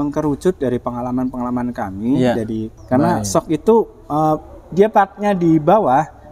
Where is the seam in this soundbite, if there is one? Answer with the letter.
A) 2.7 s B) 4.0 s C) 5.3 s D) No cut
A